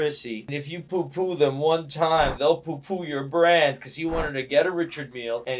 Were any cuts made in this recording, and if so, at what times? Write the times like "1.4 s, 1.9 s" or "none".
none